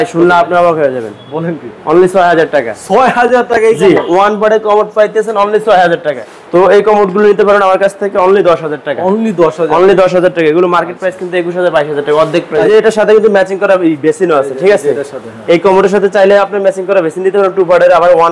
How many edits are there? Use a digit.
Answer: 2